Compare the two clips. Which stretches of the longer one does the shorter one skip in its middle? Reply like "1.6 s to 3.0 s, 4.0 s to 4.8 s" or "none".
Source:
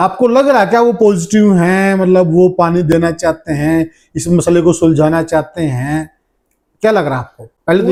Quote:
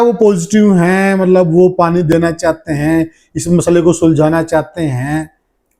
none